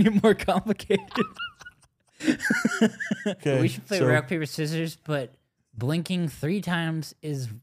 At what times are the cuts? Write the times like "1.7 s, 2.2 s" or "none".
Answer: 3.4 s